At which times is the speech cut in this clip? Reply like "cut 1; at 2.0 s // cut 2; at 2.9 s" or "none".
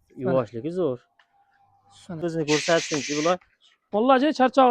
cut 1; at 2.3 s